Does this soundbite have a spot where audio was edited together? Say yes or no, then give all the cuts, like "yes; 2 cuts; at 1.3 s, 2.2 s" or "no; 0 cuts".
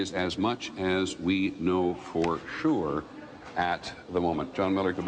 no; 0 cuts